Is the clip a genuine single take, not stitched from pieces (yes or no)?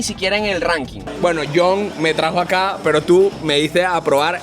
no